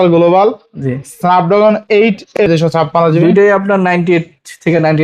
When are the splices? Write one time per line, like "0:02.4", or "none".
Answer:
0:02.4